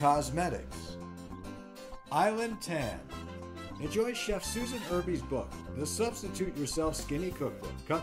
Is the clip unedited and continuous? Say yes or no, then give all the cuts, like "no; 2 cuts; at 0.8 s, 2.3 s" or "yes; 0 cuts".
yes; 0 cuts